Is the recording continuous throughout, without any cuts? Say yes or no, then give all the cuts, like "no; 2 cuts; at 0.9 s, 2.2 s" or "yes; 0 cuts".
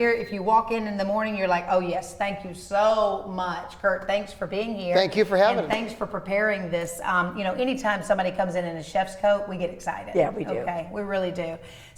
yes; 0 cuts